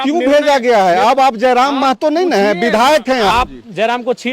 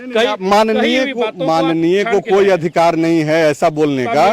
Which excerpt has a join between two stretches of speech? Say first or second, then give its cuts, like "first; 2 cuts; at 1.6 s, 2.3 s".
first; 1 cut; at 3.3 s